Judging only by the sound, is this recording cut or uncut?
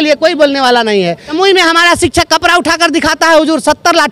cut